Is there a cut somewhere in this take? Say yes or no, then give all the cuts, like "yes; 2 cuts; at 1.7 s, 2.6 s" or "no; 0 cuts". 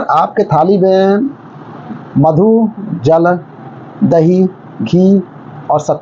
no; 0 cuts